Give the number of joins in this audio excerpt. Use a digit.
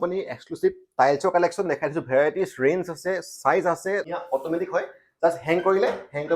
1